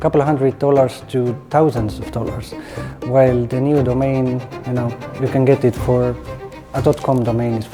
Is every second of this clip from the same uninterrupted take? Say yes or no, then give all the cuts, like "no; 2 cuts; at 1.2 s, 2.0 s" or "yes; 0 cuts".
yes; 0 cuts